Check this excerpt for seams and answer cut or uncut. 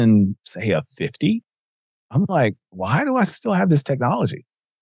uncut